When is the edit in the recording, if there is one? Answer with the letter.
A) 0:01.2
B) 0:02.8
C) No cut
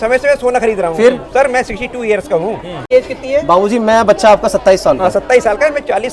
B